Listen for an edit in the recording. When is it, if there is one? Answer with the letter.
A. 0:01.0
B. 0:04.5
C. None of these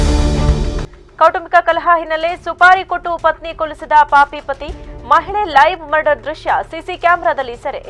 C